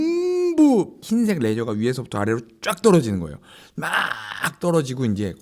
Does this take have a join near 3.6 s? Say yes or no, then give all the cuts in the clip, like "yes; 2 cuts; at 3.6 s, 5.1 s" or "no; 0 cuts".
no; 1 cut; at 1.0 s